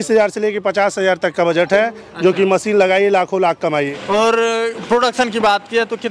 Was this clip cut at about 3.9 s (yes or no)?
yes